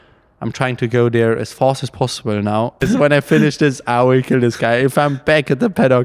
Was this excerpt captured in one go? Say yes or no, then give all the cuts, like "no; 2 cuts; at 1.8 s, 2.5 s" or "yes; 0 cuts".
no; 1 cut; at 2.8 s